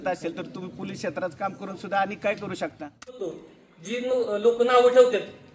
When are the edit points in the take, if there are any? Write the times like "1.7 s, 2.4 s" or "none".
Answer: 3.4 s